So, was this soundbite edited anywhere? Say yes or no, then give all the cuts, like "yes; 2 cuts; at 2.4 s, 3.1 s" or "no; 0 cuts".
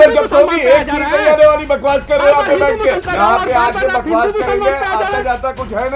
yes; 1 cut; at 3.0 s